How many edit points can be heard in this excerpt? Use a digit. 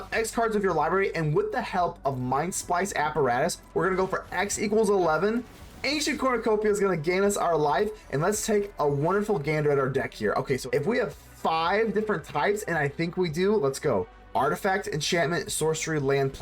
2